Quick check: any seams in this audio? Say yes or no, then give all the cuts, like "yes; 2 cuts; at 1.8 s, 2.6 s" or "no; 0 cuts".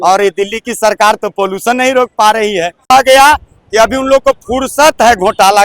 yes; 1 cut; at 2.9 s